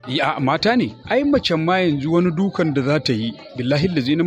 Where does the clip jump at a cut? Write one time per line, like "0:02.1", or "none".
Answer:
0:01.0